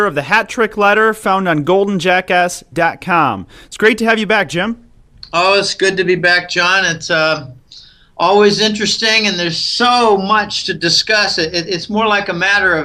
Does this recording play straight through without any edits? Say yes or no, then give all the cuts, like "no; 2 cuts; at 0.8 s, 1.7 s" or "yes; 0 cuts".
no; 1 cut; at 3.6 s